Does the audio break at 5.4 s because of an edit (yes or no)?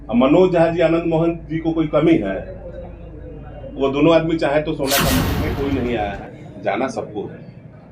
yes